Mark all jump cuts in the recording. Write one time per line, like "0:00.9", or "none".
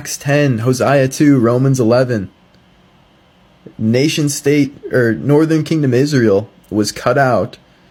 none